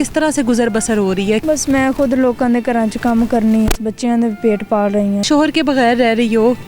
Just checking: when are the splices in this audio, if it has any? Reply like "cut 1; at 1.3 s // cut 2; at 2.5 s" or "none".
cut 1; at 1.4 s // cut 2; at 3.8 s // cut 3; at 5.2 s